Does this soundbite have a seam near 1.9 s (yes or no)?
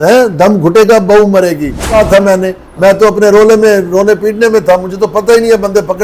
yes